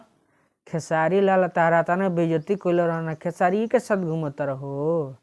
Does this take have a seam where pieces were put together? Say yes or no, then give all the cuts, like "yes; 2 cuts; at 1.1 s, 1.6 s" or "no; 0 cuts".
no; 0 cuts